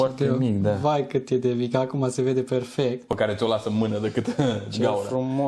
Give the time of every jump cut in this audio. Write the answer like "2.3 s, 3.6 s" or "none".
3.1 s